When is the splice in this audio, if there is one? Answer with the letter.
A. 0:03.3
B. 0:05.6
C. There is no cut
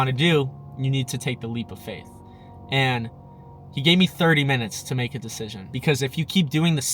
B